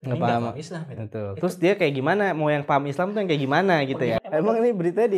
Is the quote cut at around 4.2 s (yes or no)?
yes